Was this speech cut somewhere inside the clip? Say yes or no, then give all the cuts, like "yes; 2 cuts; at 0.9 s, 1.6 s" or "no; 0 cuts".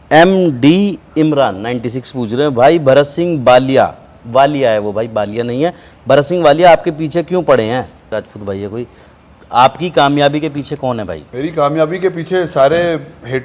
yes; 2 cuts; at 8.1 s, 11.2 s